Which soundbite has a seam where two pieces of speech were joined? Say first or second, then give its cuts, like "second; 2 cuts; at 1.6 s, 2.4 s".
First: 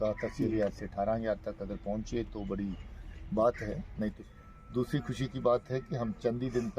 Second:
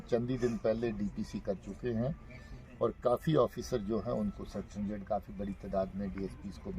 first; 1 cut; at 4.2 s